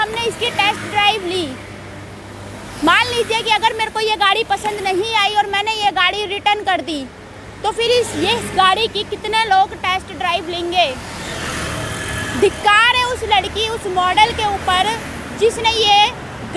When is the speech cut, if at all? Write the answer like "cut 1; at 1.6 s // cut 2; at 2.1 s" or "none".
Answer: none